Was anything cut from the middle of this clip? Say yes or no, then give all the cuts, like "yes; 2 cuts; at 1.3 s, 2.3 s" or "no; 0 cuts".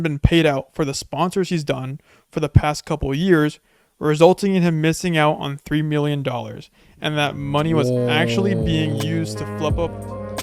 no; 0 cuts